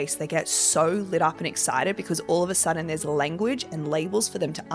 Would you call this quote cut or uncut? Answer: uncut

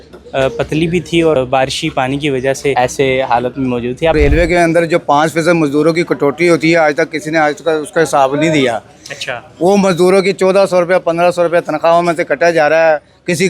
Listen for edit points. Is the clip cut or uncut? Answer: cut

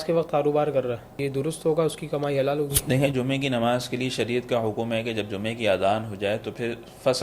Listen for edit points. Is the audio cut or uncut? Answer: cut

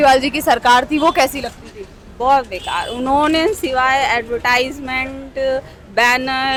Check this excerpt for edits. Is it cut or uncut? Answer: uncut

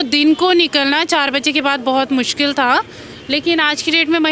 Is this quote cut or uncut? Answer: uncut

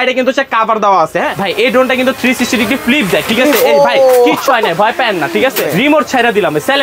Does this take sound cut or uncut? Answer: cut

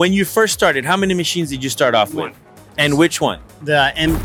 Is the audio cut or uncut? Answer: uncut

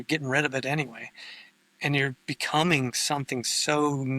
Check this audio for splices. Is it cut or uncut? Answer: uncut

